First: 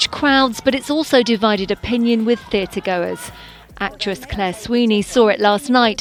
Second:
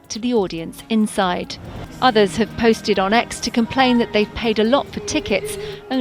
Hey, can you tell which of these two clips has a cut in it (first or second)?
second